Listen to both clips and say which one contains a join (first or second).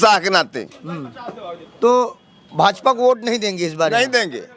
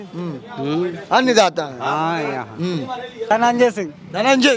second